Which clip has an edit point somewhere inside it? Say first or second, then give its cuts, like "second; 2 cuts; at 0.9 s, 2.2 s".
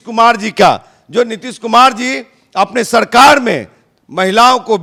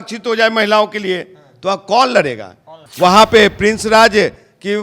second; 1 cut; at 2.8 s